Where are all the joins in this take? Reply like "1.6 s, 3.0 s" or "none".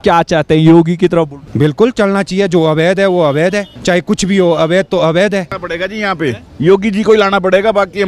1.4 s, 3.7 s, 5.6 s